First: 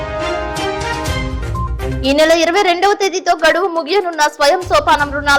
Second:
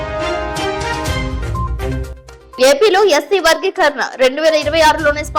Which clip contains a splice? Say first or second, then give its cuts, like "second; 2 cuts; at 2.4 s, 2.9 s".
first; 1 cut; at 1.9 s